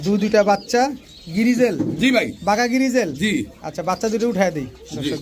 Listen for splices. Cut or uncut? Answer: uncut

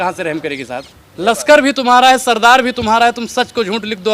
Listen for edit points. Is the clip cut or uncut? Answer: cut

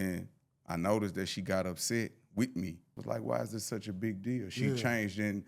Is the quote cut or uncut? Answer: cut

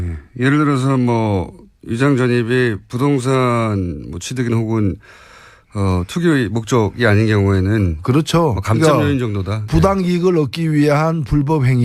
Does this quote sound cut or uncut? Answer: cut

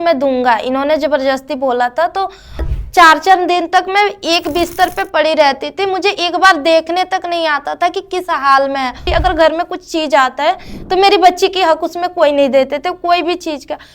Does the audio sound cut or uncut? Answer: cut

